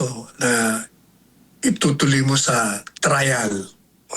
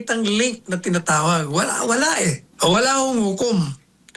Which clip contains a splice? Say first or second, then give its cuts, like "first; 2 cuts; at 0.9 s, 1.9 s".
second; 1 cut; at 2.5 s